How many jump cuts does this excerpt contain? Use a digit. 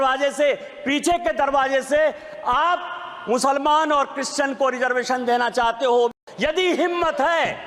1